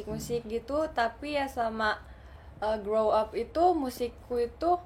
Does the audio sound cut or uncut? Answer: uncut